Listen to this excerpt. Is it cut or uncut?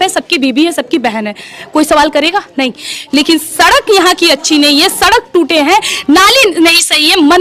uncut